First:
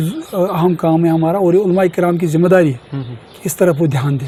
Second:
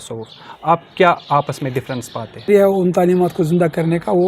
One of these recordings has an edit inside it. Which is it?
second; 1 cut; at 2.5 s

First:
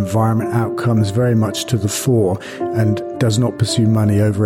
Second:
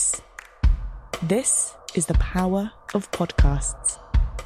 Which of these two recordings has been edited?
first; 1 cut; at 3.1 s

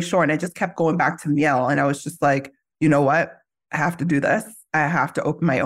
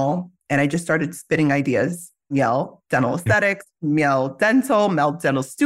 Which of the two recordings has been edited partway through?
second; 1 cut; at 2.3 s

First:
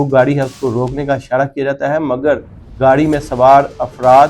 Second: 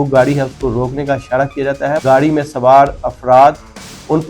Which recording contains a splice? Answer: second; 1 cut; at 2.0 s

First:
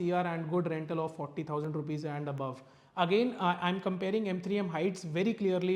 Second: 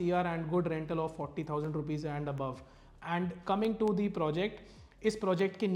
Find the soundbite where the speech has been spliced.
first; 1 cut; at 2.7 s

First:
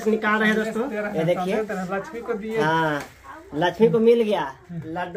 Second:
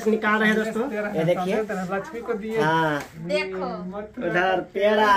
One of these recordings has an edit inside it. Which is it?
second; 1 cut; at 3.1 s

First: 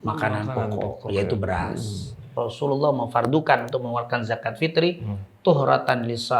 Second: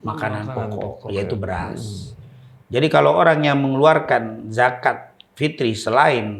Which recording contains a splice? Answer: first; 1 cut; at 2.2 s

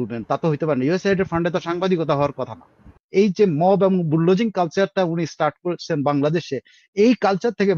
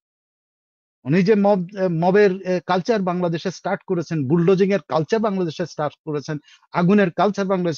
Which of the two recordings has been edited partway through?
first; 1 cut; at 3.0 s

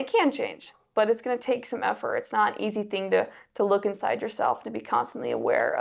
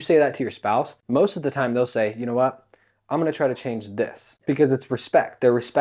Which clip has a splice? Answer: second; 2 cuts; at 1.0 s, 4.3 s

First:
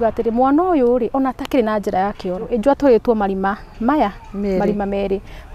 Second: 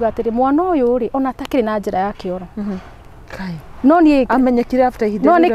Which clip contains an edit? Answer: first; 1 cut; at 2.5 s

